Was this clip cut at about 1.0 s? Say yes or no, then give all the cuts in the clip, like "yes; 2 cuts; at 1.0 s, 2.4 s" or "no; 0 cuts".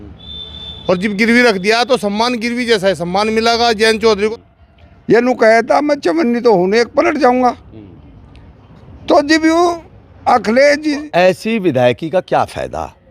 no; 2 cuts; at 4.3 s, 11.1 s